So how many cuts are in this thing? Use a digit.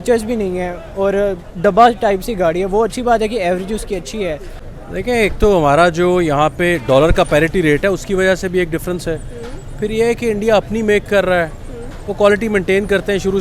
1